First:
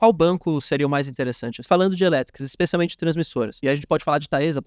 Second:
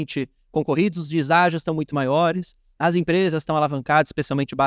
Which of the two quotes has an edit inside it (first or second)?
first